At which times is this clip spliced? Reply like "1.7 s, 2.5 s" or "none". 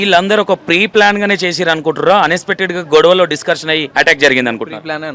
3.9 s